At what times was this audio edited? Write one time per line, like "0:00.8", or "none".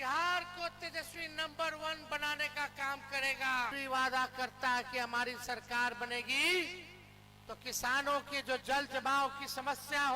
0:03.7

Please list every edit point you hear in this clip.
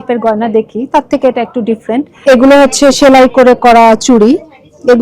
0:02.2

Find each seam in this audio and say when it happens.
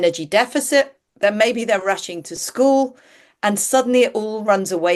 0:01.0

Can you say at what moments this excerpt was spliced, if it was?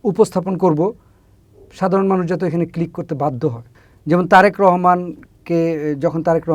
none

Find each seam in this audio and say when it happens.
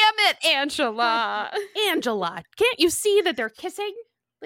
0:01.7

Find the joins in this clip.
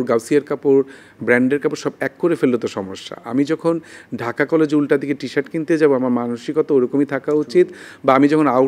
none

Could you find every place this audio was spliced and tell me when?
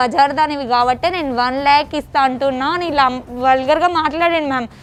none

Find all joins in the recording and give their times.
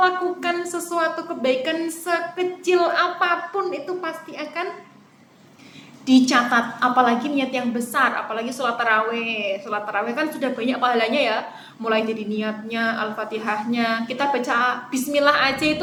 none

